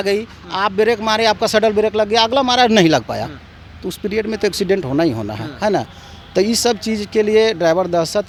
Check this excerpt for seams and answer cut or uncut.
uncut